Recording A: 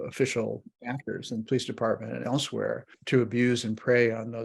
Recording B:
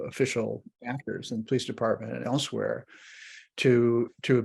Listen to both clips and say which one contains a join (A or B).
A